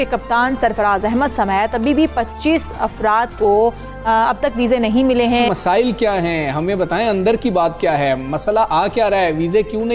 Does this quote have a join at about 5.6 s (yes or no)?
yes